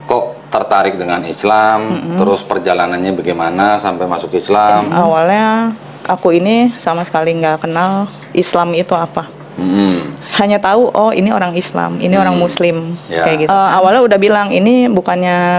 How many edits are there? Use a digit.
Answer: 2